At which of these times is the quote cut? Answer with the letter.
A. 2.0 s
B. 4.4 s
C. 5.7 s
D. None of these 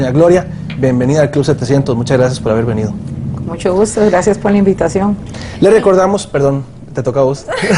C